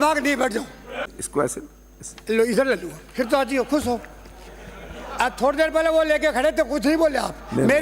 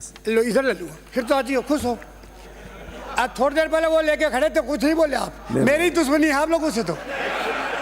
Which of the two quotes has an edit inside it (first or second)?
first